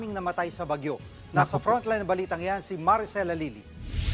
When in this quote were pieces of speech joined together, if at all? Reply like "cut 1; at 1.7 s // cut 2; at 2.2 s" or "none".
cut 1; at 1.4 s